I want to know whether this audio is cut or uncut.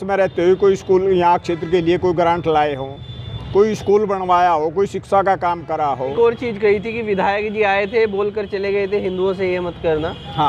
cut